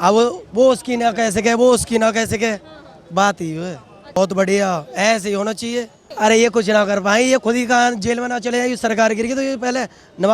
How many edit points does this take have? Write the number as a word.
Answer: two